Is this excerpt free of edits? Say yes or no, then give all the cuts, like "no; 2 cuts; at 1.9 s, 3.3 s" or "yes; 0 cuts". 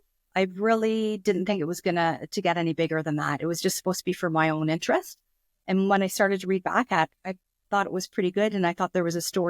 no; 1 cut; at 7.3 s